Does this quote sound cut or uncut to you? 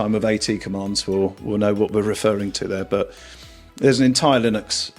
uncut